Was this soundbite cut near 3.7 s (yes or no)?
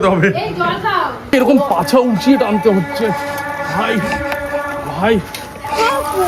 no